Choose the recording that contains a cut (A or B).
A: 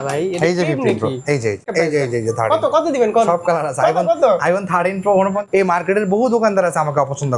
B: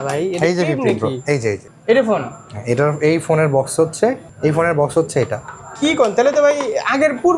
A